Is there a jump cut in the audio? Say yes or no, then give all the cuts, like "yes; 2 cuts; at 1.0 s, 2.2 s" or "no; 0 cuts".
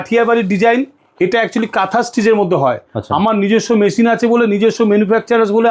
no; 0 cuts